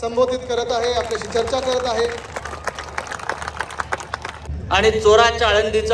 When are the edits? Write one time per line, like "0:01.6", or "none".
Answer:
0:04.5